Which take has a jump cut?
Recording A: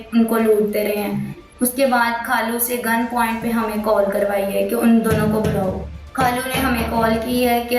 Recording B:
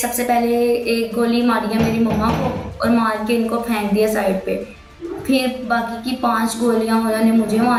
A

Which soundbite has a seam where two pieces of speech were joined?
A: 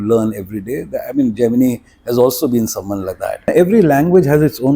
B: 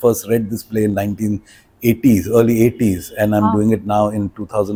A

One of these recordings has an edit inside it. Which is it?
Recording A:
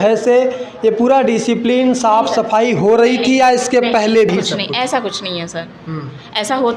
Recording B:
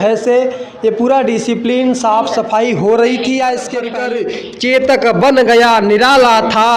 B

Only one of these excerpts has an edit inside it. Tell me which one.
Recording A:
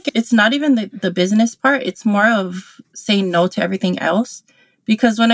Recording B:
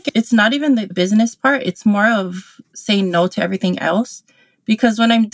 B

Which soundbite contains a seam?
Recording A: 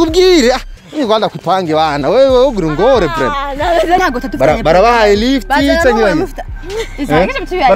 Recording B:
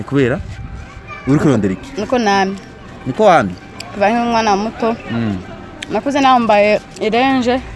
A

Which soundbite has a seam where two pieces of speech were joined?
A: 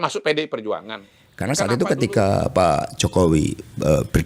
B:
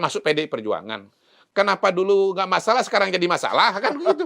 A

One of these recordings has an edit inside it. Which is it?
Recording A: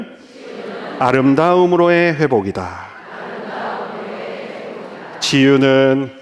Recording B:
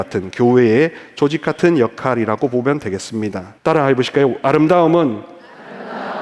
B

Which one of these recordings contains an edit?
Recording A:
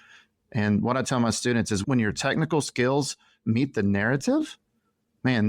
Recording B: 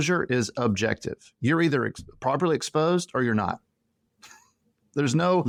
A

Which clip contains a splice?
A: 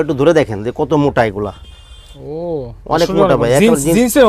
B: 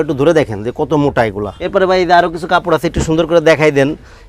B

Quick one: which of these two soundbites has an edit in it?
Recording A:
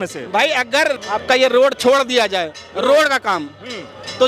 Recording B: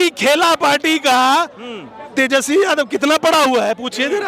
A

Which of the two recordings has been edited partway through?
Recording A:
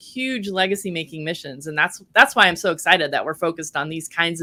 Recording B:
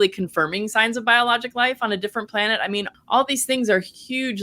B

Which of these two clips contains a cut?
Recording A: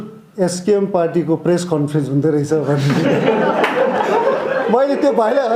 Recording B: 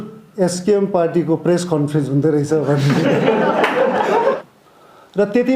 B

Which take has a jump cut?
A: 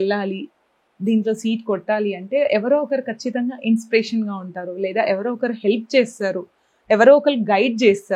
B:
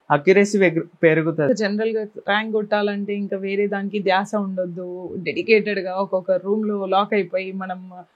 B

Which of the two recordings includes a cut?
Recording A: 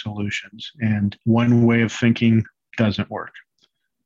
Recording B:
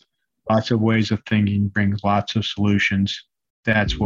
A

